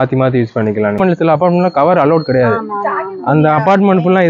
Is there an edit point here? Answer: yes; 1 cut; at 0.9 s

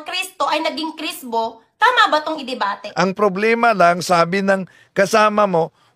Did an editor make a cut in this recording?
yes; 1 cut; at 2.8 s

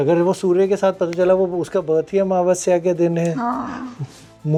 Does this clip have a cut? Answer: no; 0 cuts

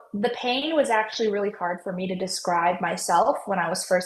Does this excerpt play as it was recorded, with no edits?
yes; 0 cuts

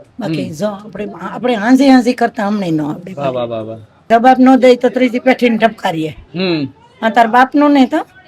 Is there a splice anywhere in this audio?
yes; 1 cut; at 4.0 s

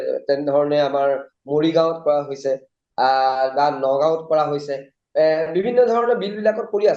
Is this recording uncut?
yes; 0 cuts

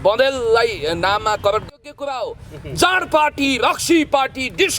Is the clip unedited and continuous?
no; 1 cut; at 1.7 s

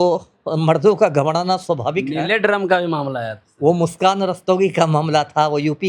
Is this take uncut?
yes; 0 cuts

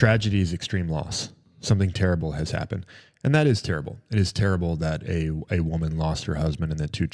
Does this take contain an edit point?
no; 0 cuts

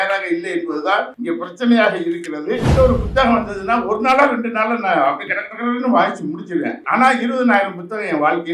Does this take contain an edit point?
yes; 3 cuts; at 1.1 s, 2.7 s, 6.8 s

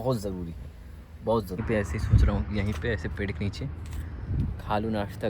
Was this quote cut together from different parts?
yes; 1 cut; at 1.6 s

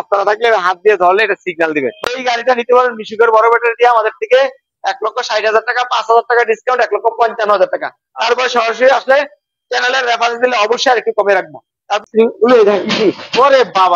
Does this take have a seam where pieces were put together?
yes; 2 cuts; at 2.1 s, 12.0 s

